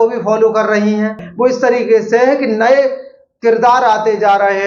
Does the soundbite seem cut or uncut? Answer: cut